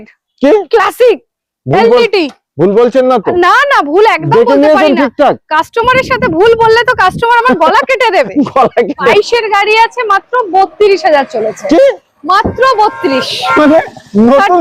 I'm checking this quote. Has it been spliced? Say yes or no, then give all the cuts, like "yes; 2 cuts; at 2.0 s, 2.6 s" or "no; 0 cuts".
yes; 1 cut; at 9.1 s